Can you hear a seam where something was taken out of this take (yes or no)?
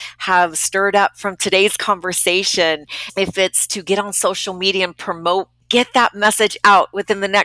yes